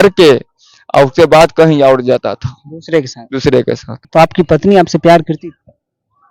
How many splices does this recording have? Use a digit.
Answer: 1